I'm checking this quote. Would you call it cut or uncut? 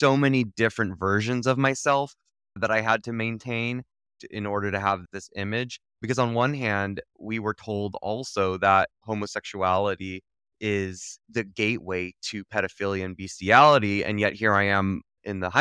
cut